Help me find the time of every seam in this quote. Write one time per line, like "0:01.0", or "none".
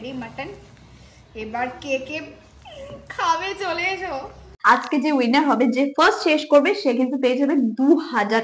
0:04.5